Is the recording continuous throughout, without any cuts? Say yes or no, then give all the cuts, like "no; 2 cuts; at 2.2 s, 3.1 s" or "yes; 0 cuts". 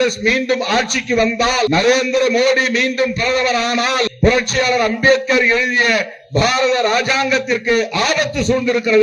no; 2 cuts; at 1.7 s, 4.1 s